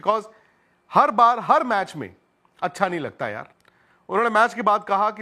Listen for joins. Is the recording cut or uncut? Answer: cut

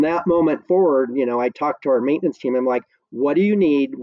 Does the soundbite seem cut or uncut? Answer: uncut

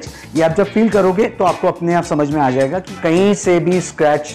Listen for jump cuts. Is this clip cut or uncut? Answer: cut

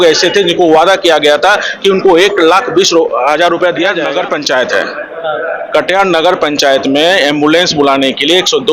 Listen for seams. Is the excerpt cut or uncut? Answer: cut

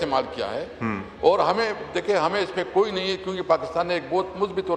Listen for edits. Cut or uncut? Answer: uncut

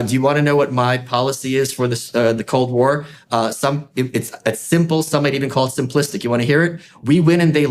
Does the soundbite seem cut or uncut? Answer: uncut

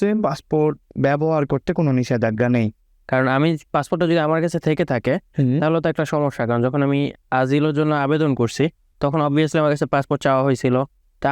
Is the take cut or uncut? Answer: cut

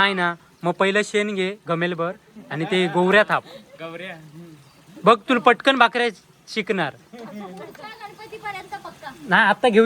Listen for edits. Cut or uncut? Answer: uncut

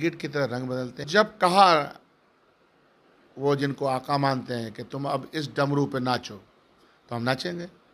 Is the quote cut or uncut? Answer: cut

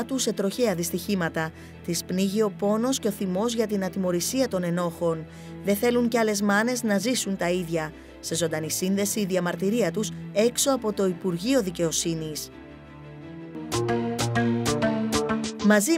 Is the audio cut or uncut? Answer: uncut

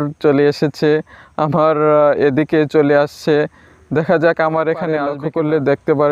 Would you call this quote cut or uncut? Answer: cut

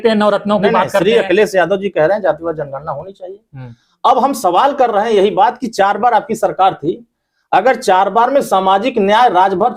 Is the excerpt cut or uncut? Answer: uncut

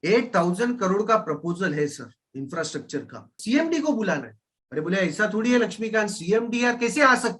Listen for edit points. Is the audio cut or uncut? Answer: cut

